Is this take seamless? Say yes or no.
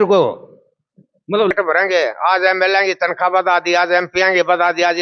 no